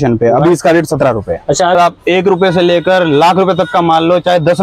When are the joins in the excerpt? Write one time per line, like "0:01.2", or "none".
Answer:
0:01.8

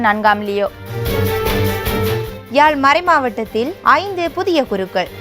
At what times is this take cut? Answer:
0:01.0
0:02.3

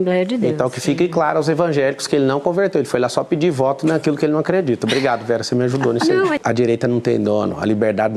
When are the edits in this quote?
none

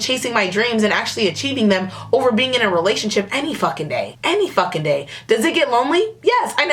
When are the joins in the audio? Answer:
none

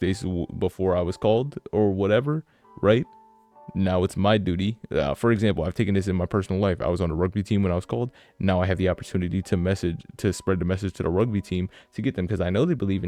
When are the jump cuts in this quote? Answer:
none

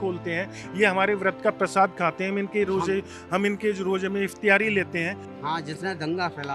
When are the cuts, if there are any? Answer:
0:05.3

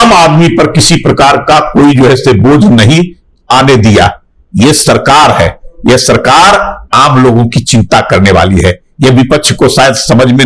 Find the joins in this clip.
none

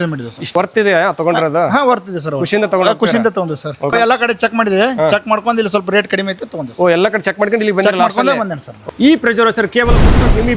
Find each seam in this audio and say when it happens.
0:03.9

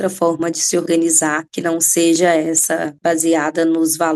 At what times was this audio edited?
0:01.5
0:02.9

